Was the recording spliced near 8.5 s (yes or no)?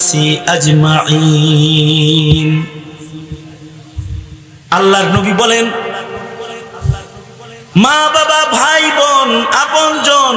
no